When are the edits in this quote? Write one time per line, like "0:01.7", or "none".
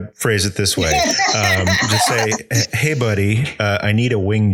none

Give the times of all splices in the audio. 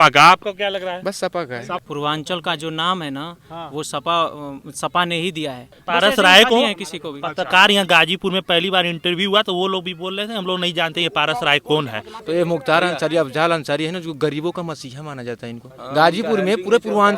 0:01.8
0:05.8
0:12.1

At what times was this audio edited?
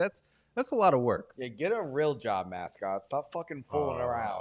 none

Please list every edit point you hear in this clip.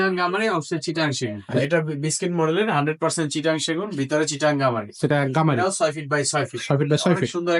0:01.4

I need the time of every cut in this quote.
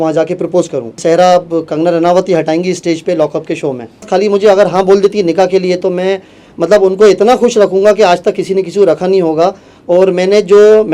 0:01.0
0:04.1

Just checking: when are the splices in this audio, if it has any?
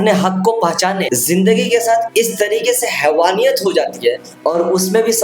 0:01.1

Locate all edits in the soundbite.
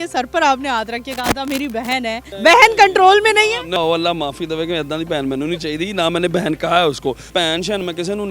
0:02.3
0:03.8
0:07.2

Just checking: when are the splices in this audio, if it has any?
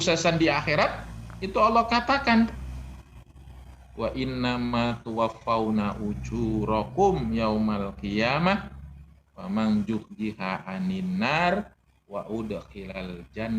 none

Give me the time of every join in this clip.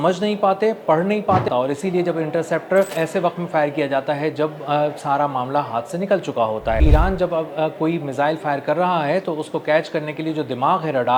0:01.5
0:02.9
0:06.8

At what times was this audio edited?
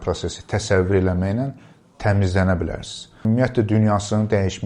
0:03.1

